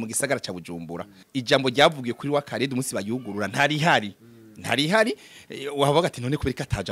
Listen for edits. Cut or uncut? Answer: cut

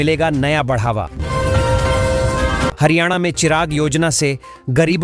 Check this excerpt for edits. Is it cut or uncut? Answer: uncut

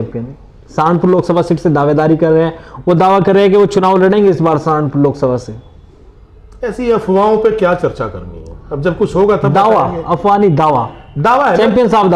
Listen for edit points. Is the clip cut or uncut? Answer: uncut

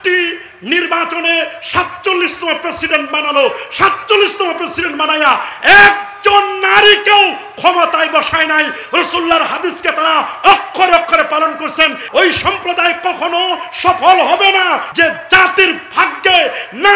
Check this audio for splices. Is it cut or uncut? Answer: cut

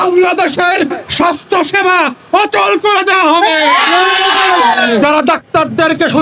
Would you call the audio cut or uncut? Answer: cut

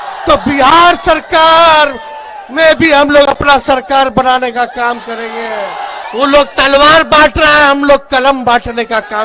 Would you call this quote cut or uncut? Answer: cut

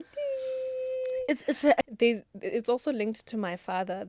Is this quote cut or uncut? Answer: cut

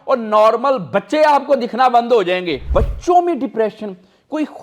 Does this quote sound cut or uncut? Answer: cut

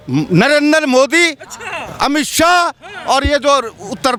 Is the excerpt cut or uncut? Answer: uncut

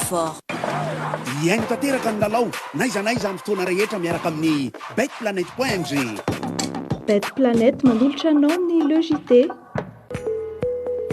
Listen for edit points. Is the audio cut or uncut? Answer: cut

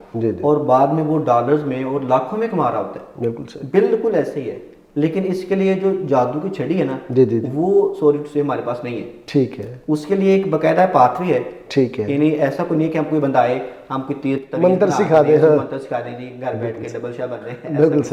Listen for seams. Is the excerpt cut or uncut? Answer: uncut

